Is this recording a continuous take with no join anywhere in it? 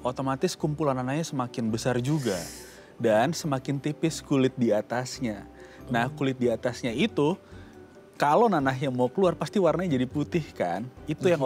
yes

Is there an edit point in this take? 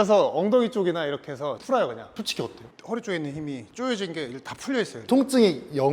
yes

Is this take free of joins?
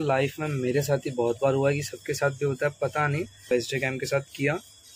no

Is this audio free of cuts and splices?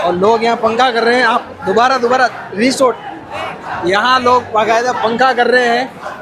yes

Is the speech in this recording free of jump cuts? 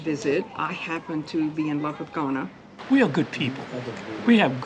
no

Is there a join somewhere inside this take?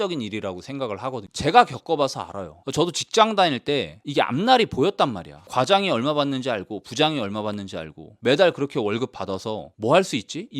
yes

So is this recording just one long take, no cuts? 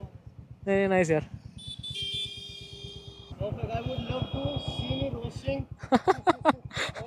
no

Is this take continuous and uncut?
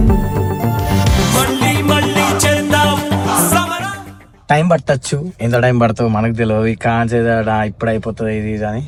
yes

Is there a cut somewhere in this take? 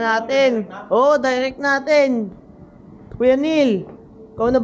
no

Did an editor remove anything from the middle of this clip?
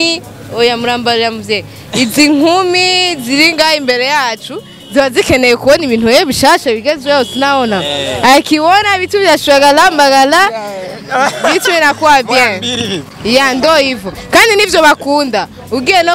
no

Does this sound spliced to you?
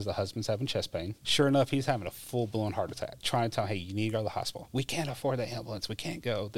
yes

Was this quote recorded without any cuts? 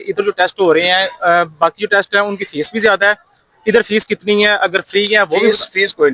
yes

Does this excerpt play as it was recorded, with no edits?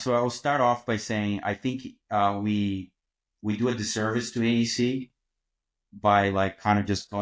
yes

